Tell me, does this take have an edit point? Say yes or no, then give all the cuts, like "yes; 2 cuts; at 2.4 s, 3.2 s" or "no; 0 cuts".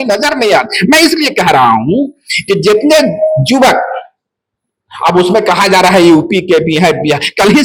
no; 0 cuts